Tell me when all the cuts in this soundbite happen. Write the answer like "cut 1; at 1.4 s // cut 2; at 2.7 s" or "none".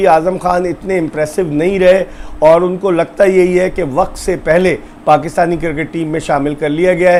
none